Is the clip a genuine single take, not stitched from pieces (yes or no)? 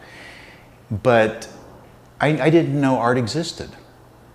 yes